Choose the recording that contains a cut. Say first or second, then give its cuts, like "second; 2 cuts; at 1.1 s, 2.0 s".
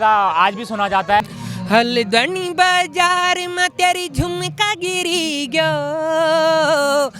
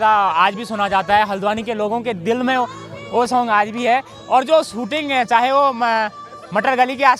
first; 1 cut; at 1.2 s